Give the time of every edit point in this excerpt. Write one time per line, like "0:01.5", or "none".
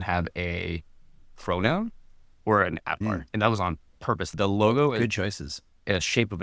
0:03.3
0:04.3